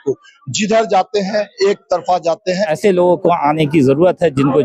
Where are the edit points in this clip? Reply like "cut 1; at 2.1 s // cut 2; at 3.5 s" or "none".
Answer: cut 1; at 2.6 s